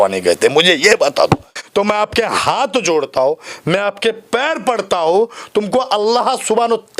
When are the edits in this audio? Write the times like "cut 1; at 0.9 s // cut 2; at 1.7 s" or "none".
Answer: cut 1; at 1.5 s